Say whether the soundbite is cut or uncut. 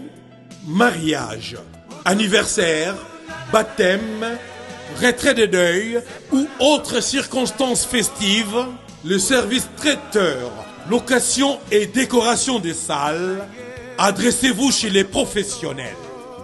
uncut